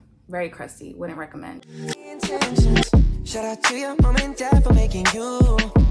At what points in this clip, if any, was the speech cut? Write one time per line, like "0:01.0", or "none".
0:01.9